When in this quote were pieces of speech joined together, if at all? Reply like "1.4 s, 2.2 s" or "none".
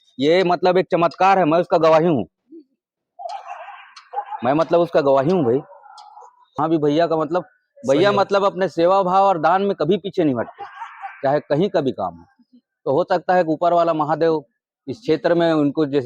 6.6 s